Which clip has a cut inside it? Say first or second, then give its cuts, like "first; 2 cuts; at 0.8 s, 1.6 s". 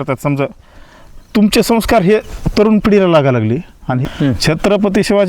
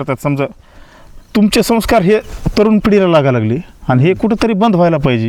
first; 1 cut; at 4.0 s